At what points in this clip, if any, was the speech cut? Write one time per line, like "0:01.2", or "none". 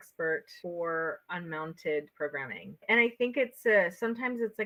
none